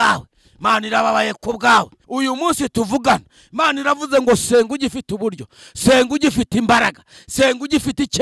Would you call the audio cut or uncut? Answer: cut